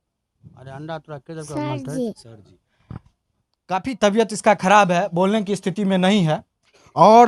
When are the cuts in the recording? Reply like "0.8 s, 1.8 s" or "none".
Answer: none